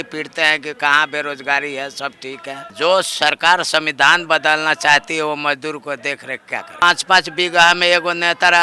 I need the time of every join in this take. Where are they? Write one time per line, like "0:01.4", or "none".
0:02.7
0:06.8